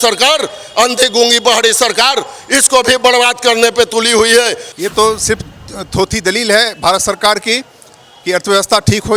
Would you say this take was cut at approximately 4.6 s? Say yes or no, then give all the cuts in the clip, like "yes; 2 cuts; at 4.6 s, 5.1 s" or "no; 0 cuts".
yes; 1 cut; at 4.6 s